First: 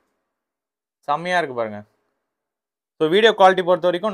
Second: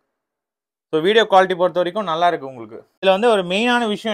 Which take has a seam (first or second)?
second